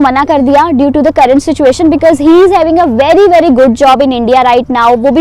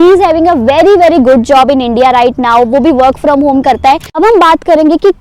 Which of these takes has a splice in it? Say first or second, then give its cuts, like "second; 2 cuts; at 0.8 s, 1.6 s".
second; 1 cut; at 4.1 s